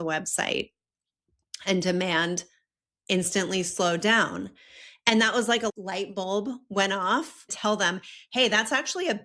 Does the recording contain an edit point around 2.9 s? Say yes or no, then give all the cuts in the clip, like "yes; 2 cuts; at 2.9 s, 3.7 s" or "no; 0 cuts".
no; 2 cuts; at 5.7 s, 7.5 s